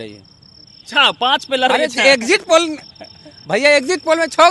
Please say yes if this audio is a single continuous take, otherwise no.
yes